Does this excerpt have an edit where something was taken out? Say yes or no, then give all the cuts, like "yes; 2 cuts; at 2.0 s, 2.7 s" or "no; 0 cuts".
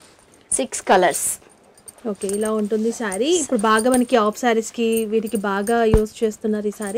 no; 0 cuts